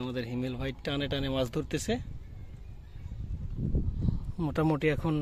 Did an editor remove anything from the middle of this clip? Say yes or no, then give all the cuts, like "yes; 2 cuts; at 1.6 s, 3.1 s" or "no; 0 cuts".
no; 0 cuts